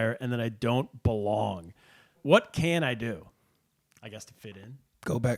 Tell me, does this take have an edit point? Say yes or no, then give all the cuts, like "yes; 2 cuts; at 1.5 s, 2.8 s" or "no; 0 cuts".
yes; 1 cut; at 2.2 s